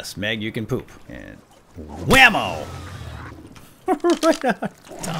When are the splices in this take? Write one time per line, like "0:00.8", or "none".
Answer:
0:01.1